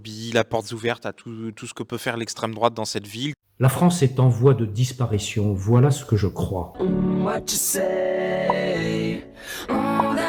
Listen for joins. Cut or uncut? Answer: uncut